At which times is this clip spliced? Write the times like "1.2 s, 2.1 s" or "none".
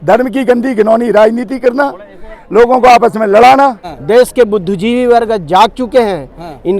3.9 s